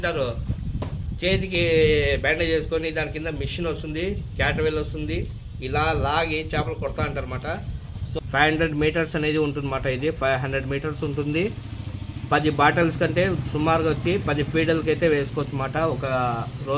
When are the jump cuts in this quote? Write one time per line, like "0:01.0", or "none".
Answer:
0:08.0